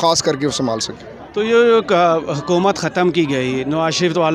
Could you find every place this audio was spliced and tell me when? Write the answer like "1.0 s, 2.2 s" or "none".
none

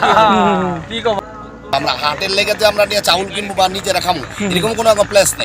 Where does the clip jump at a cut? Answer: 1.2 s

